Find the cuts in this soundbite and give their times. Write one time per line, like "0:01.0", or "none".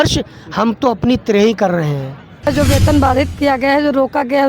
0:02.4